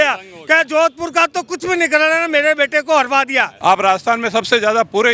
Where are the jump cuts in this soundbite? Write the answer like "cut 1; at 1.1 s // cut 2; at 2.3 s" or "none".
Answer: cut 1; at 3.5 s